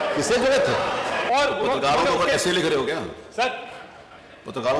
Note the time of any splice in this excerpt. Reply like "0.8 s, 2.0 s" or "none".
1.2 s